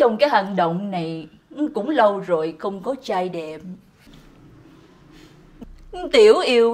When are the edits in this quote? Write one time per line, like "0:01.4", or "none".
0:03.9
0:05.6

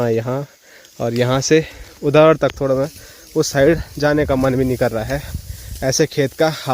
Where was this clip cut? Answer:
none

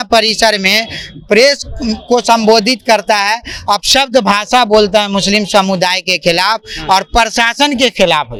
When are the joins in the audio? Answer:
none

